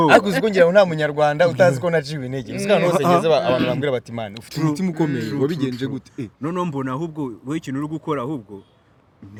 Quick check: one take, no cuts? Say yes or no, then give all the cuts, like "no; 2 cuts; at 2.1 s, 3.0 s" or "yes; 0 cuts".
yes; 0 cuts